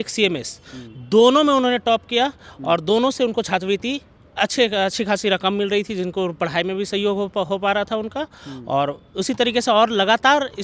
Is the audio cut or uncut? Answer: uncut